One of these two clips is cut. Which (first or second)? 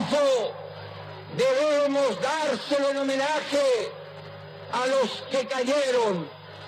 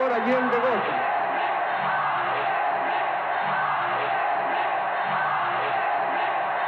first